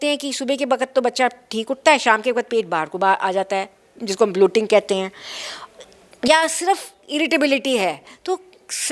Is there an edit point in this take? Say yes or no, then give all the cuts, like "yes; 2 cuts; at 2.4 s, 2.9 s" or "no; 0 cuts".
no; 0 cuts